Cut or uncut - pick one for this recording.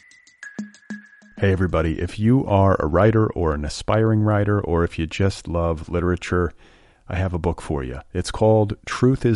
cut